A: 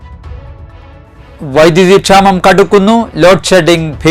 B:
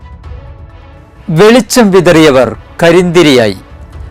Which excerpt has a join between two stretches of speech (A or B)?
A